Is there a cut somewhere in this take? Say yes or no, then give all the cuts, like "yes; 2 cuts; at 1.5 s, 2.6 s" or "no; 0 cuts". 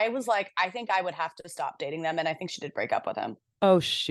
no; 0 cuts